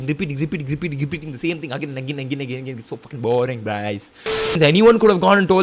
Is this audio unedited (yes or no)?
no